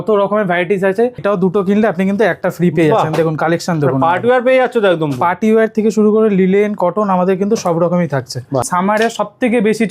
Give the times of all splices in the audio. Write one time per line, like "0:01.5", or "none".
0:01.2
0:08.7

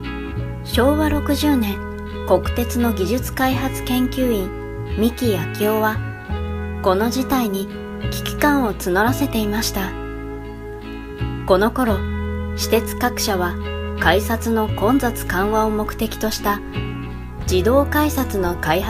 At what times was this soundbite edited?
none

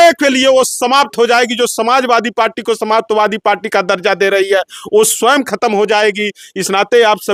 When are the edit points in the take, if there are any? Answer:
none

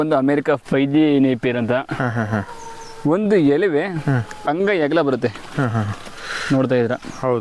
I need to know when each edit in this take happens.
none

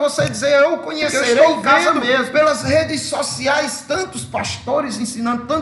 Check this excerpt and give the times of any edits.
0:02.3

